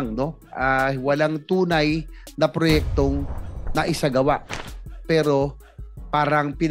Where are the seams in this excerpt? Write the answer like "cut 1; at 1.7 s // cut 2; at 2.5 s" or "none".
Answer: none